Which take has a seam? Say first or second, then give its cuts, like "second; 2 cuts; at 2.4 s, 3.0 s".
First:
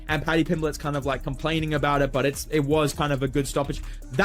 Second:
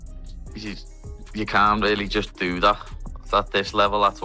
first; 1 cut; at 2.7 s